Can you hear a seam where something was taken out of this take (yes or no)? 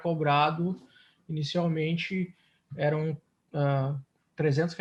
no